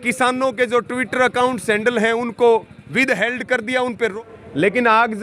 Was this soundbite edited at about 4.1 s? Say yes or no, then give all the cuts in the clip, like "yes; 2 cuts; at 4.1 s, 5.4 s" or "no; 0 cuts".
yes; 1 cut; at 4.1 s